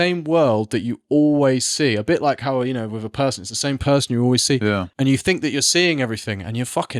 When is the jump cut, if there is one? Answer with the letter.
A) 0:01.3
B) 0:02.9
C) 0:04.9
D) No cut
C